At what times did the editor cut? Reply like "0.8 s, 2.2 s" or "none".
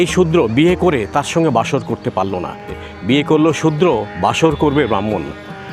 2.9 s